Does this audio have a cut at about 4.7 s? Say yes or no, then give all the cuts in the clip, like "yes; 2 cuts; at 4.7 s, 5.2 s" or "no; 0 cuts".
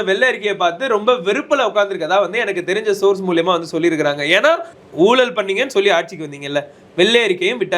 yes; 1 cut; at 4.7 s